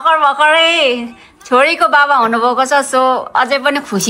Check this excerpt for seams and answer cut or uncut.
uncut